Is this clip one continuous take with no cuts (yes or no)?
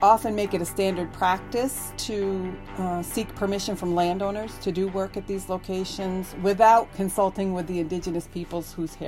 yes